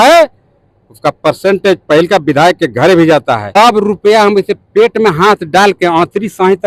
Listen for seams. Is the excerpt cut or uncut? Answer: cut